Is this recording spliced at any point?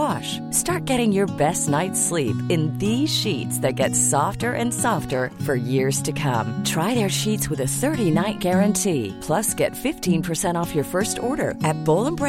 no; 0 cuts

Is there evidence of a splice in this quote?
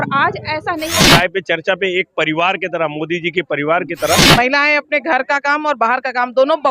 yes; 2 cuts; at 1.1 s, 4.3 s

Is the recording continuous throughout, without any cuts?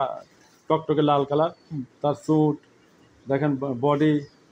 yes; 0 cuts

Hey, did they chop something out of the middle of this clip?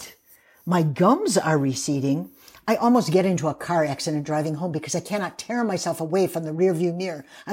no; 0 cuts

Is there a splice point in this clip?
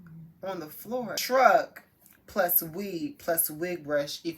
yes; 1 cut; at 1.2 s

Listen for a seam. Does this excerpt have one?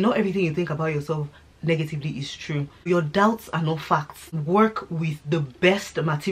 yes; 2 cuts; at 2.9 s, 4.4 s

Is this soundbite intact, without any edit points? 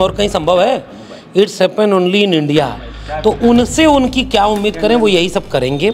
yes; 0 cuts

